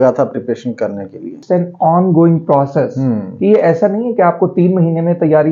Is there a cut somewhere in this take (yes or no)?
yes